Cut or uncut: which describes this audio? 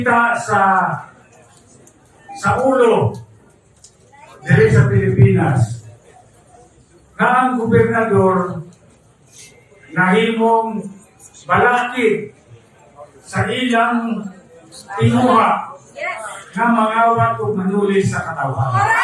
uncut